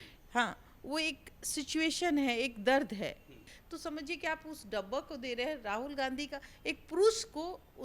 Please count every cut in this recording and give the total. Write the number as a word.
one